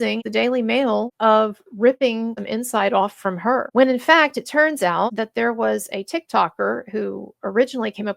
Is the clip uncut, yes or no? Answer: no